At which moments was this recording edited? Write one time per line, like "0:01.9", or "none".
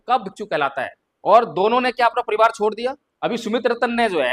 0:01.0
0:03.1